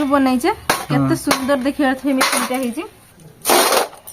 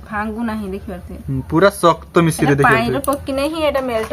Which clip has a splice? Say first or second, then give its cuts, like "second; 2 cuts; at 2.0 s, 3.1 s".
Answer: first; 1 cut; at 3.1 s